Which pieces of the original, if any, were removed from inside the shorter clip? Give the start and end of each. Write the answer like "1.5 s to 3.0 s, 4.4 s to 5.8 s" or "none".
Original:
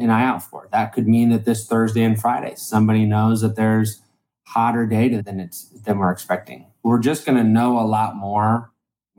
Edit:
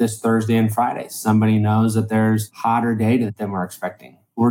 4.0 s to 4.4 s, 5.3 s to 5.8 s